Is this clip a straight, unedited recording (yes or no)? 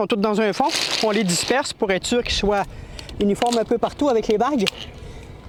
yes